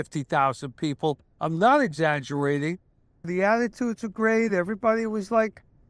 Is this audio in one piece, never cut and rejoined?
no; 1 cut; at 3.3 s

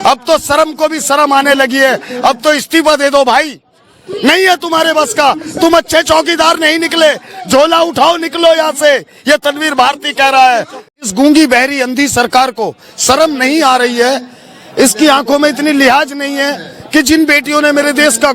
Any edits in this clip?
yes; 1 cut; at 11.0 s

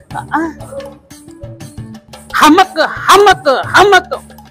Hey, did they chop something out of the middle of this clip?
yes; 1 cut; at 2.1 s

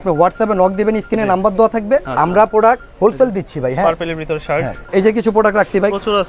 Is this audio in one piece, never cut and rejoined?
no; 2 cuts; at 2.1 s, 4.8 s

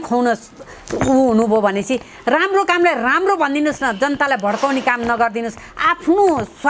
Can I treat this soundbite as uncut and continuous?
yes; 0 cuts

